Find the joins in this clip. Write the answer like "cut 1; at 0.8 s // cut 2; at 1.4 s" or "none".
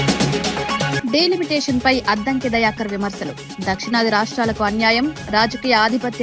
cut 1; at 0.9 s

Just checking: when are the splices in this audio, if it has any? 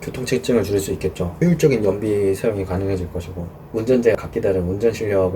cut 1; at 1.3 s // cut 2; at 3.6 s // cut 3; at 4.2 s

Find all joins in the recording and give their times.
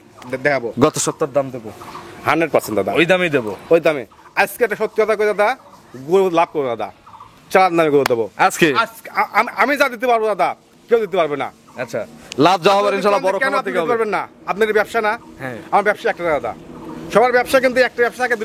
none

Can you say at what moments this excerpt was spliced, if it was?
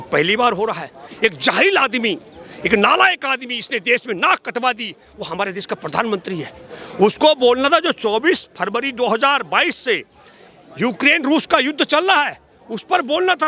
none

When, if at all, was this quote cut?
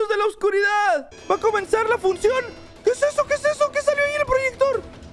cut 1; at 1.1 s

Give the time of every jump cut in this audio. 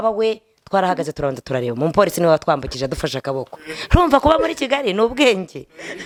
none

